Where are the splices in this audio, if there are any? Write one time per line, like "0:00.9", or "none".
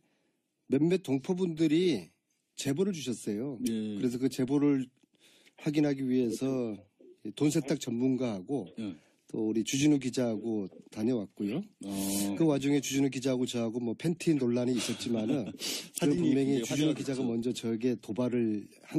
0:08.3